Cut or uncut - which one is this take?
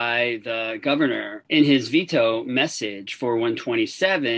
cut